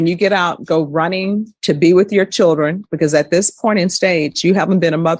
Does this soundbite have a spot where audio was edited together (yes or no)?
no